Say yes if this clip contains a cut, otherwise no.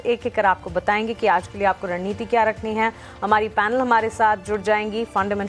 yes